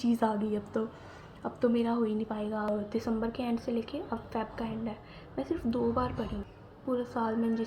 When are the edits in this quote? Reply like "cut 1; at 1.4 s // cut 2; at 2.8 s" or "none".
cut 1; at 2.7 s // cut 2; at 6.4 s